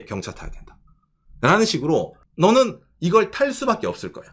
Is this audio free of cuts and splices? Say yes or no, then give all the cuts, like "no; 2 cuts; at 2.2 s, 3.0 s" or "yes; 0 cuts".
no; 1 cut; at 2.2 s